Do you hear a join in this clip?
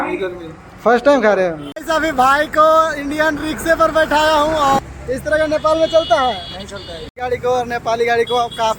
yes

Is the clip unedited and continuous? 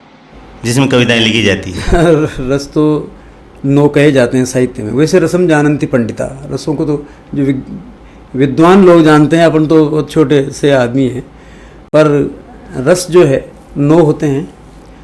yes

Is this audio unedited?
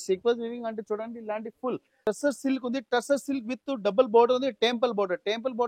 no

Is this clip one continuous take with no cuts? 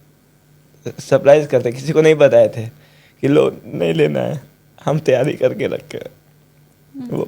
yes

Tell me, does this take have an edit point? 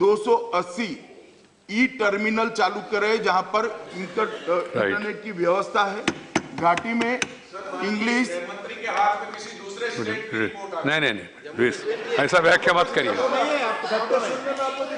no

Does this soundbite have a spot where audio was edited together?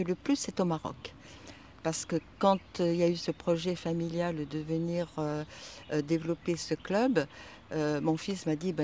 no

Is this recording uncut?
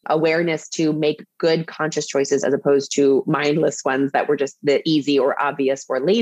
yes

